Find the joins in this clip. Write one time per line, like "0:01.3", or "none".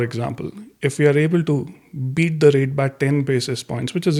none